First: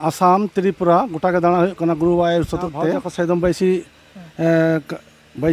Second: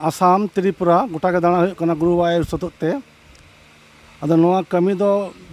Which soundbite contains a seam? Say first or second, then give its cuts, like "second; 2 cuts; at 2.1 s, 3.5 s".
first; 1 cut; at 3.1 s